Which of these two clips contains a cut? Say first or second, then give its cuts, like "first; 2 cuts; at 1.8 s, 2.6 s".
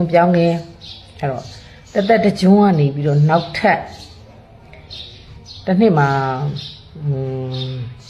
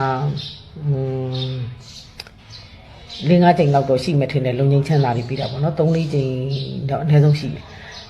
second; 1 cut; at 4.2 s